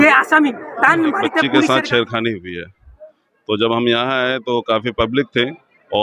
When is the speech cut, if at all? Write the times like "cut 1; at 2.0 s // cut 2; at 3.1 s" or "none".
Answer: cut 1; at 1.7 s